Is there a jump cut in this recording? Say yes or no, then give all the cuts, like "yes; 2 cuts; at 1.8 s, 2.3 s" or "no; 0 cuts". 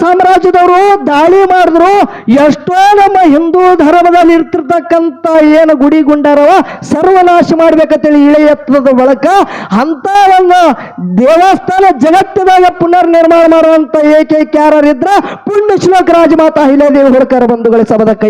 no; 0 cuts